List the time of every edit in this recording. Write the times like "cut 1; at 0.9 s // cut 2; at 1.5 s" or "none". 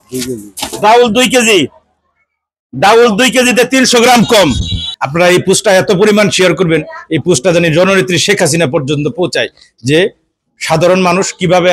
cut 1; at 4.9 s